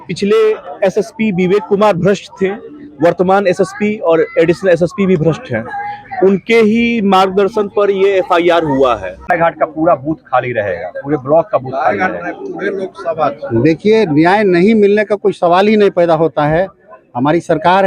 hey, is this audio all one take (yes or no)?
no